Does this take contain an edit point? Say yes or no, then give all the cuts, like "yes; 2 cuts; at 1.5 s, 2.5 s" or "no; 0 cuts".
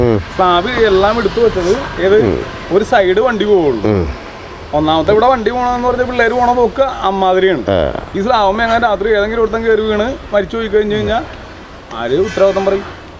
no; 0 cuts